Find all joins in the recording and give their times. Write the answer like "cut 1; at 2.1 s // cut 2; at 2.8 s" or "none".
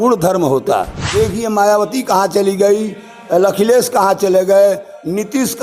cut 1; at 1.0 s